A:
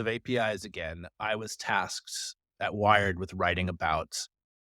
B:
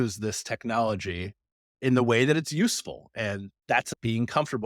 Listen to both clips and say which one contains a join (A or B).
B